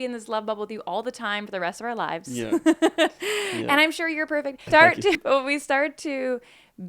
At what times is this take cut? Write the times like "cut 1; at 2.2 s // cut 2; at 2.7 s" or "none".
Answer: none